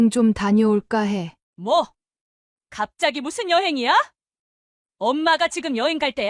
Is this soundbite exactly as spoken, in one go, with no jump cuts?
no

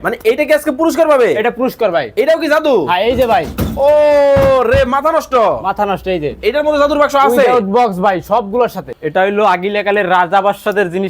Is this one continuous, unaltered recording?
no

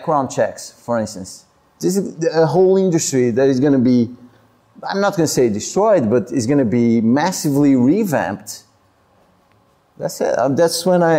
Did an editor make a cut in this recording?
no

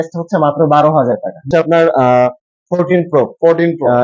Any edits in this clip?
yes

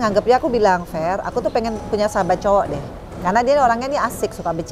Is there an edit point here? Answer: no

